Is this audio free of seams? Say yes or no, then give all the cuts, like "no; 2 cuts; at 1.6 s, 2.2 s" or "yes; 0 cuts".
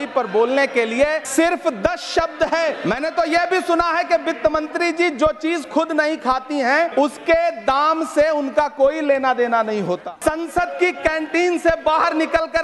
no; 4 cuts; at 1.2 s, 2.8 s, 6.9 s, 10.0 s